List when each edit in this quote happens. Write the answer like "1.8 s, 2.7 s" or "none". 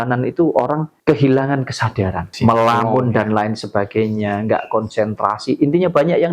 0.9 s, 2.3 s